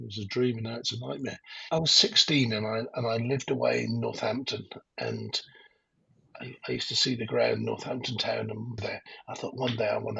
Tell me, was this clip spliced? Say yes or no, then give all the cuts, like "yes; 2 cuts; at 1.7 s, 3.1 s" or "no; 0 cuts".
yes; 2 cuts; at 1.5 s, 8.7 s